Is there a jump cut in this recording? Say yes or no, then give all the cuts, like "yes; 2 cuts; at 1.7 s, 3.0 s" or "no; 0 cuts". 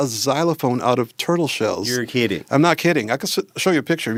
no; 0 cuts